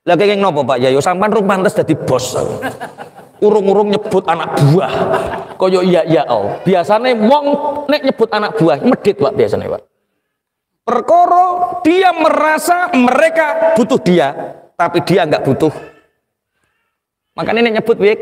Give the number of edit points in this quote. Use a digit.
0